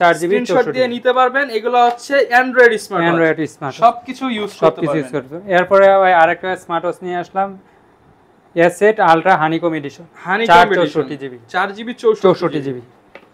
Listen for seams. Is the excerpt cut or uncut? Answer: uncut